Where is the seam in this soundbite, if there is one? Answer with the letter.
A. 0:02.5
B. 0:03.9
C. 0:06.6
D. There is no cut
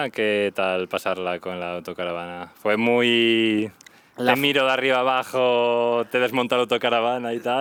D